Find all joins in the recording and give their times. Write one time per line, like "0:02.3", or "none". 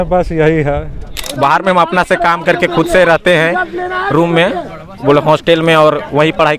0:01.2